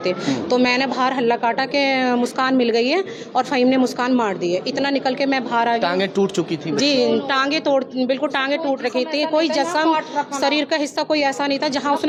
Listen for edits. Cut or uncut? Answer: uncut